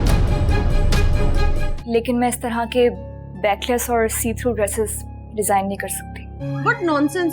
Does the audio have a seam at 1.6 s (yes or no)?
yes